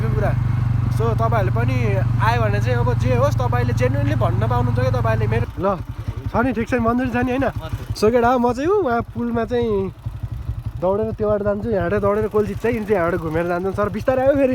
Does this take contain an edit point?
yes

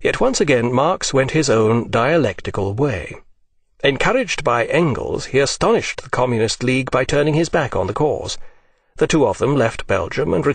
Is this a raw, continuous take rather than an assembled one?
yes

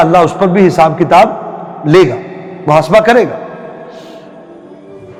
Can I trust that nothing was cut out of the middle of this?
yes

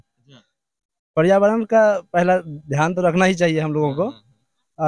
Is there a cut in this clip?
no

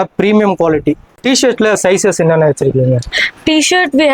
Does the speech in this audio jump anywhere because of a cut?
yes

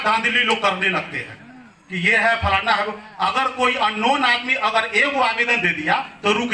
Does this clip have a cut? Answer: no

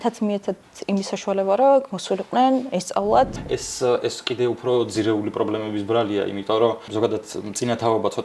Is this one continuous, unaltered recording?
no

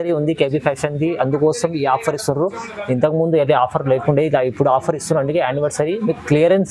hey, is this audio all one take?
yes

